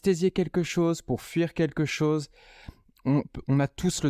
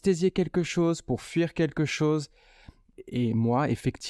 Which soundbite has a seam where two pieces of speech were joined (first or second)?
second